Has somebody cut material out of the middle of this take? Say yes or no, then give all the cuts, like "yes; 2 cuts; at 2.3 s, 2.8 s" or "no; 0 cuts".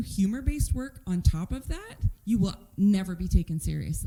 no; 0 cuts